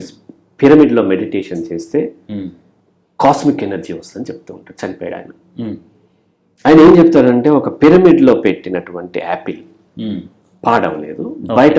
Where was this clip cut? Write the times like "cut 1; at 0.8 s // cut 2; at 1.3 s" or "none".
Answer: none